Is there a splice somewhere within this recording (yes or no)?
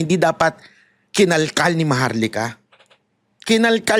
no